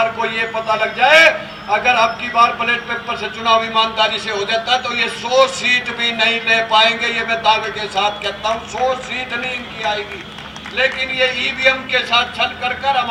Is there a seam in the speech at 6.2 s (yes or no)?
no